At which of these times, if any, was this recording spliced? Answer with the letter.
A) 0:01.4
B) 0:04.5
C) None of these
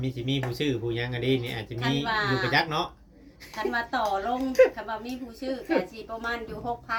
C